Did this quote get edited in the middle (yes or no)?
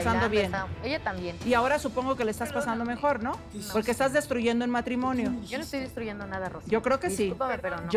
no